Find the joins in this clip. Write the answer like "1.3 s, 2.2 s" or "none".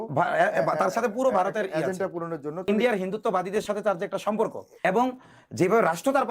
2.7 s, 4.8 s